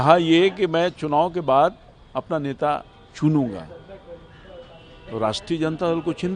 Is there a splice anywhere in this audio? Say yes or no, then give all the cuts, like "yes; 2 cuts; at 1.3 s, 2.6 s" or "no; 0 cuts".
no; 0 cuts